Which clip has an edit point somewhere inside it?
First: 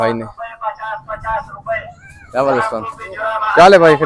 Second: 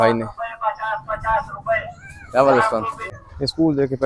second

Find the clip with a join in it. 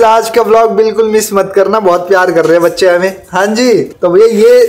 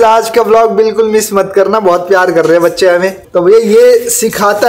second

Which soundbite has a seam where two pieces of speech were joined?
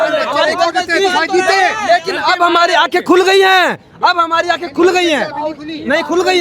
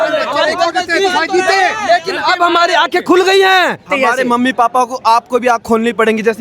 second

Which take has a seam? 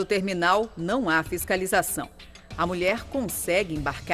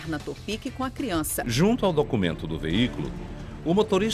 second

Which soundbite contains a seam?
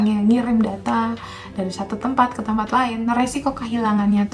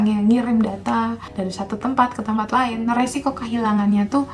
second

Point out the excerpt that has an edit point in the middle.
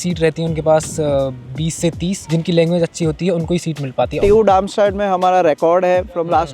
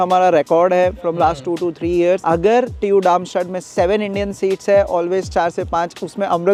first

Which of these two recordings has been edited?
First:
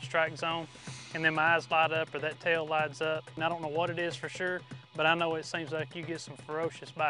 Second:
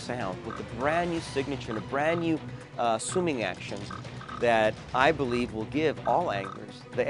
first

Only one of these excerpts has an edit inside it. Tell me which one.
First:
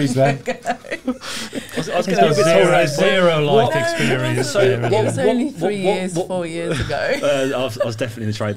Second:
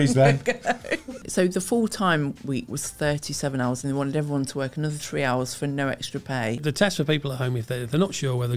second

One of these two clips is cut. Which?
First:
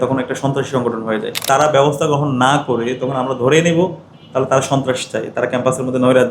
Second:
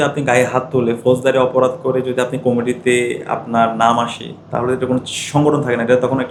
first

